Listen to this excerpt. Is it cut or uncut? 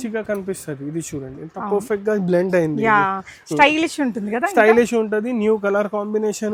uncut